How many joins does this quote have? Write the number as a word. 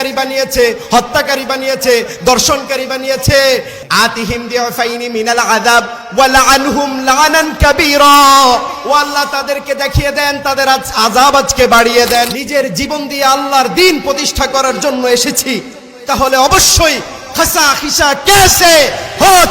two